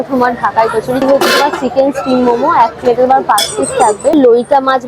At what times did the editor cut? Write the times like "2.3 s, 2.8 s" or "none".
1.0 s, 4.1 s